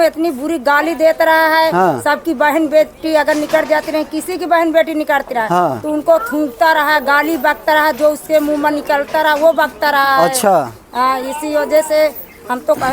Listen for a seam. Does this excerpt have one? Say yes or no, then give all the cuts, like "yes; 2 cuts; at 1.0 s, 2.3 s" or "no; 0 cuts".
no; 0 cuts